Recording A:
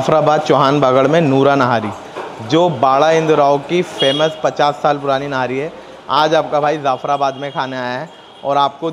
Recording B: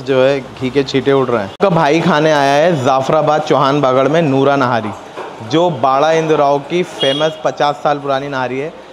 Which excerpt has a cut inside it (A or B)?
B